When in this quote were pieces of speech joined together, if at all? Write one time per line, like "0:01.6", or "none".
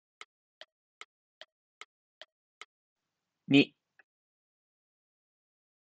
0:02.8